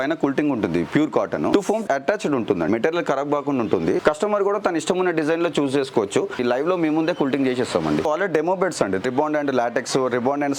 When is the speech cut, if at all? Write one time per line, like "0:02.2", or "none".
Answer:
0:01.5
0:02.7
0:04.0
0:06.4
0:08.0
0:09.0